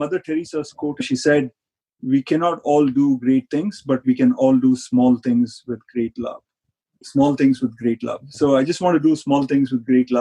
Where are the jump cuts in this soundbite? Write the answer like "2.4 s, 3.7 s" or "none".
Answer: 0.9 s, 7.0 s